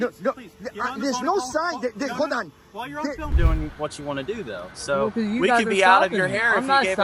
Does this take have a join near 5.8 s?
no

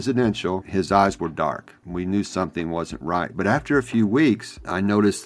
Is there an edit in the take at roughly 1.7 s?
yes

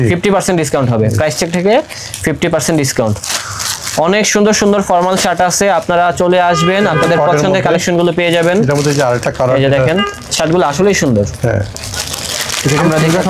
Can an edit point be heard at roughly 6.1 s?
no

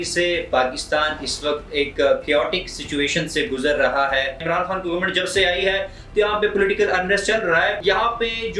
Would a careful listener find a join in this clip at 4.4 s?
yes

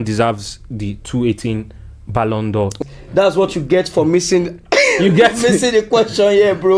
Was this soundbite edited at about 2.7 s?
yes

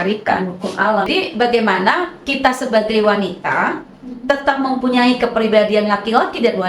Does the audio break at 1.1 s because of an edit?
yes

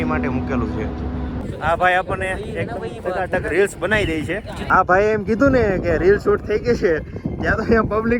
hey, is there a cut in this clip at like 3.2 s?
no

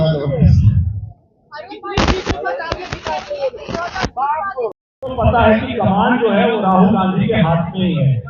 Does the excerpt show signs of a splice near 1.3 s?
no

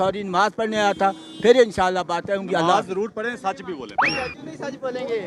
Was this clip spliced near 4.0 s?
yes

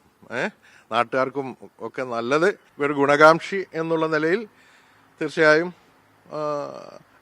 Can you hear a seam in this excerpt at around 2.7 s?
yes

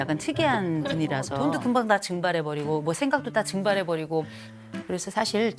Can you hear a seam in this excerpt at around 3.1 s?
no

